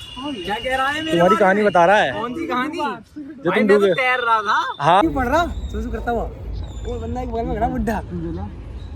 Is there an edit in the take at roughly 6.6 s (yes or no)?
no